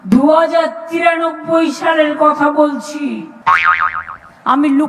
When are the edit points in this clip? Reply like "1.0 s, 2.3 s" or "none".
3.2 s